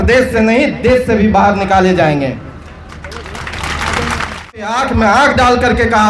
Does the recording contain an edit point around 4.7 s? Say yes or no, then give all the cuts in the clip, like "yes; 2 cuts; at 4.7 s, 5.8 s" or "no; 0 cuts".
yes; 1 cut; at 4.7 s